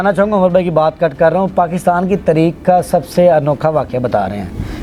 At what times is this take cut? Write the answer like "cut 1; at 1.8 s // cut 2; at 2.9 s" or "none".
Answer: none